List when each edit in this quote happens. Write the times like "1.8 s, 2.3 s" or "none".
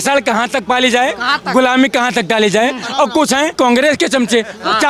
3.5 s